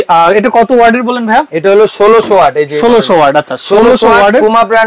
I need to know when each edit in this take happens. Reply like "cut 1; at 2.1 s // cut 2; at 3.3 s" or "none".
none